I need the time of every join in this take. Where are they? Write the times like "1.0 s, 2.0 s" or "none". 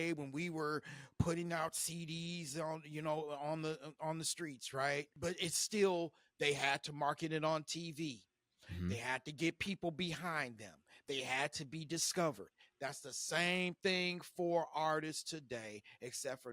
5.1 s